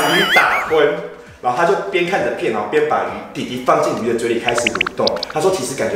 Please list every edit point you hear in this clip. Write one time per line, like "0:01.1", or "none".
none